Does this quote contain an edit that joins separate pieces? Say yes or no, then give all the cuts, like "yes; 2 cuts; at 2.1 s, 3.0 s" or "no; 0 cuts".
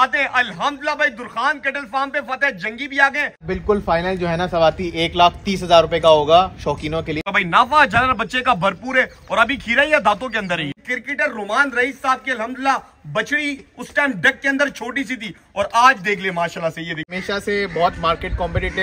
yes; 4 cuts; at 3.4 s, 7.3 s, 10.8 s, 17.1 s